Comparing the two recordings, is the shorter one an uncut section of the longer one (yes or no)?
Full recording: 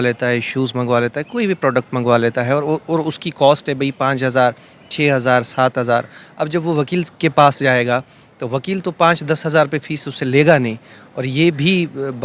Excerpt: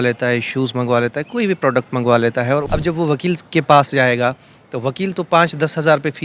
no